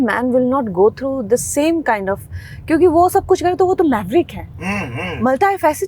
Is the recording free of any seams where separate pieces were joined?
yes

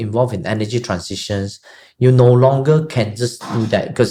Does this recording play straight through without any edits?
yes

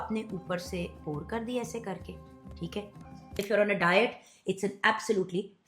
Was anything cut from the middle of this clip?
yes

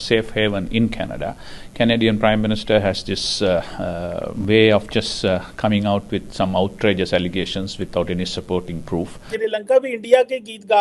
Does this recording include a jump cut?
yes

